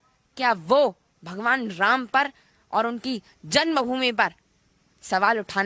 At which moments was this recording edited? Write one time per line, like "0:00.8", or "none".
none